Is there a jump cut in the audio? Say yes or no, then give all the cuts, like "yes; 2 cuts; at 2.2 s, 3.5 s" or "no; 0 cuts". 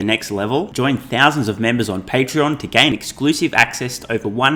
no; 0 cuts